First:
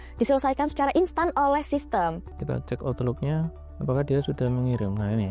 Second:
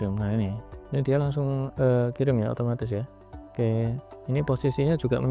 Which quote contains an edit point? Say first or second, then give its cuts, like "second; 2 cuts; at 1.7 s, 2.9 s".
first; 1 cut; at 2.3 s